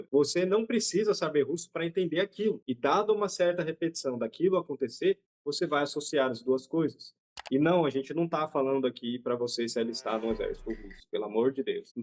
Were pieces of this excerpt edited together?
no; 0 cuts

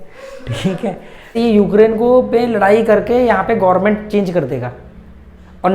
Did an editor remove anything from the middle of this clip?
yes; 1 cut; at 1.3 s

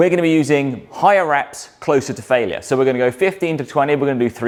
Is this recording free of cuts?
yes; 0 cuts

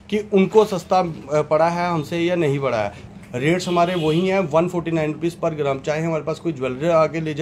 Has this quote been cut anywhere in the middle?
yes; 1 cut; at 3.0 s

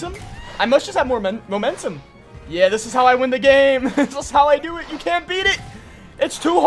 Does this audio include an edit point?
no; 0 cuts

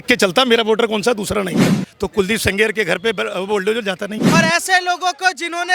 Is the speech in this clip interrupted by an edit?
yes; 2 cuts; at 1.8 s, 4.2 s

